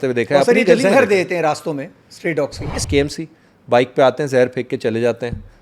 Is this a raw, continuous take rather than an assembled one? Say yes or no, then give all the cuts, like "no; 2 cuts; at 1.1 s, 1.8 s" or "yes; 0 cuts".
no; 1 cut; at 2.7 s